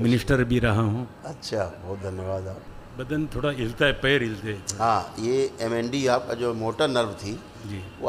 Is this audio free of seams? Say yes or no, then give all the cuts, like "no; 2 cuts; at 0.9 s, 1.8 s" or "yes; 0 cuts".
no; 1 cut; at 2.6 s